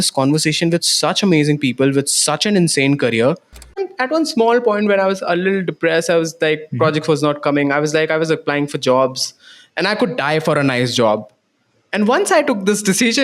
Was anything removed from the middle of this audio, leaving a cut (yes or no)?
yes